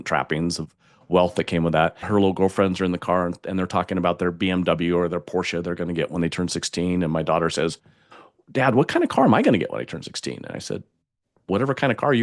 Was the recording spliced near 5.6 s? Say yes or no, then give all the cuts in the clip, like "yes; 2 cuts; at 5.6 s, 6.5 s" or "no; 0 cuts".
no; 1 cut; at 2.0 s